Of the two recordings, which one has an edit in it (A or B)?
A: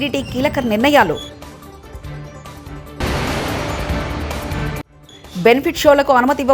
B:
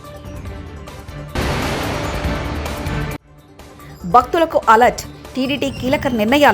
B